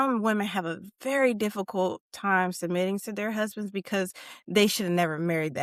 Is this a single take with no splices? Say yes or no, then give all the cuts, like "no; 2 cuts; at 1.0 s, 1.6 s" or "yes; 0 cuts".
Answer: yes; 0 cuts